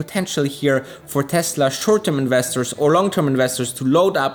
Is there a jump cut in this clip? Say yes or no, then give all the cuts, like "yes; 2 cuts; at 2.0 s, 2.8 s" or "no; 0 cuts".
no; 0 cuts